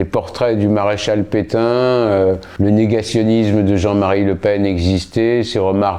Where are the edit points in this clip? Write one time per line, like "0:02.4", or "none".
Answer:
0:02.5